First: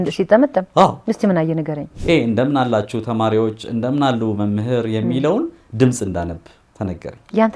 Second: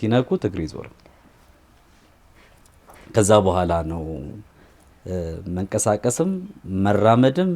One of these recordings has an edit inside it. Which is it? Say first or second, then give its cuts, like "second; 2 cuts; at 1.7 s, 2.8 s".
first; 1 cut; at 1.9 s